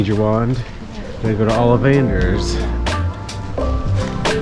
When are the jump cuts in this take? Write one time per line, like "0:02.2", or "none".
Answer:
0:02.4